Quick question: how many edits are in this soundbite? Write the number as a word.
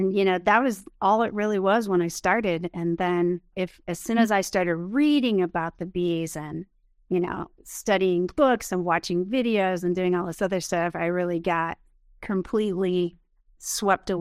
one